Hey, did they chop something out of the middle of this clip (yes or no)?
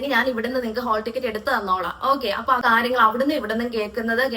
yes